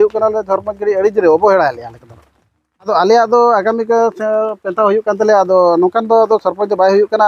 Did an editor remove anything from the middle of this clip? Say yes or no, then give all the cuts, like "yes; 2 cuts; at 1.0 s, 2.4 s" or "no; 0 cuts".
yes; 1 cut; at 2.9 s